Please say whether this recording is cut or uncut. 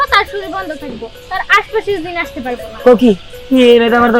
uncut